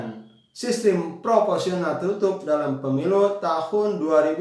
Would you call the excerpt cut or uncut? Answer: uncut